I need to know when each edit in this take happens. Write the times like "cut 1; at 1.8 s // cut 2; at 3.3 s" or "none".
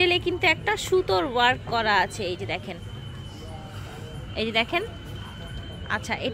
none